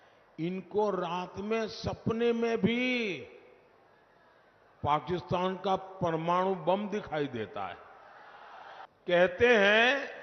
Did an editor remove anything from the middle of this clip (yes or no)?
yes